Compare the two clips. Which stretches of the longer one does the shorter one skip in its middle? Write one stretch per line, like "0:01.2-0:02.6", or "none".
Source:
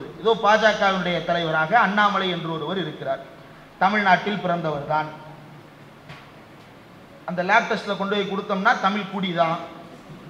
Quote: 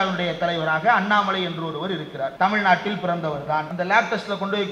0:03.2-0:03.7
0:05.1-0:07.3

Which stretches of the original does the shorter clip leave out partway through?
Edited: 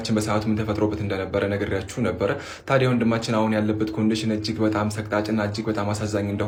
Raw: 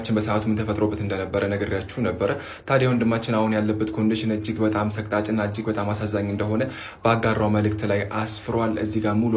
none

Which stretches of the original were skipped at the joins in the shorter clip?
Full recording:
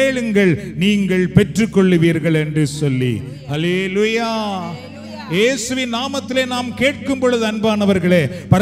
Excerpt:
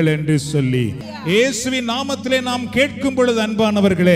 0:03.3-0:05.1

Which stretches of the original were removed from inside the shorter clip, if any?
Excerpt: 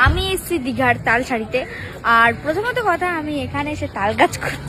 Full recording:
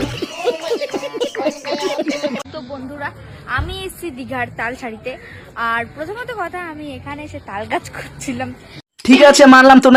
none

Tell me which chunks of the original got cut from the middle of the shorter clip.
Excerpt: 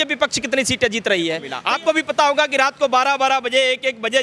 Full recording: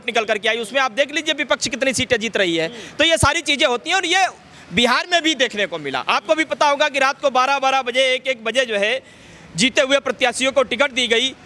0:02.8-0:05.9

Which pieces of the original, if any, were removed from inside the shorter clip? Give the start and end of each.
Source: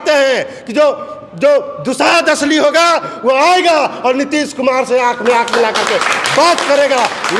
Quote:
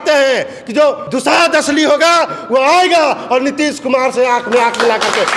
0:01.1-0:01.8

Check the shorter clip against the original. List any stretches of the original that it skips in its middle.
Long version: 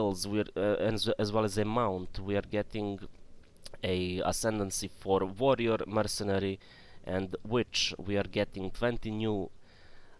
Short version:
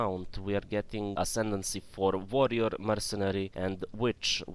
0:03.0-0:04.2
0:06.6-0:07.0

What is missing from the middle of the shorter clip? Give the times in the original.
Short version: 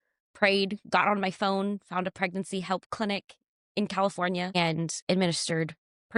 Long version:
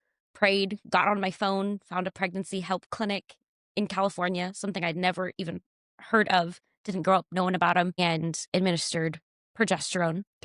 0:04.5-0:08.0

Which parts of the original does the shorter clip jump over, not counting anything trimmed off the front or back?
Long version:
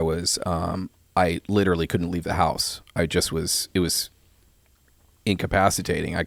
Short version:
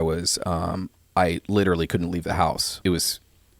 0:02.7-0:03.6

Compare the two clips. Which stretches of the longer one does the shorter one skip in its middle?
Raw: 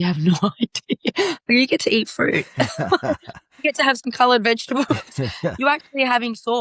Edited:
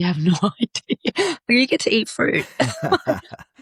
none

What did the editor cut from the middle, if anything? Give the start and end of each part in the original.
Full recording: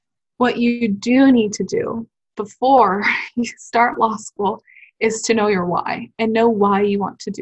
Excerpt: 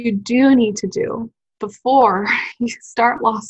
none

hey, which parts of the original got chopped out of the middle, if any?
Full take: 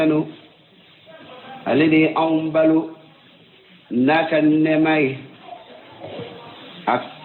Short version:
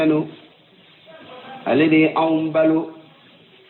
none

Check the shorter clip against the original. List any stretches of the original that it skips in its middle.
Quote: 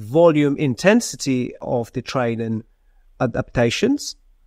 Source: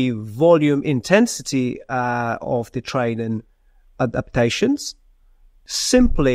0:01.9-0:02.4

